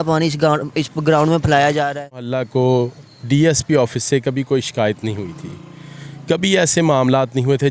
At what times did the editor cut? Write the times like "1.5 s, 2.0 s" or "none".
2.4 s